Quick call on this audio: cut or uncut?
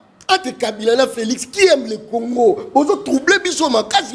uncut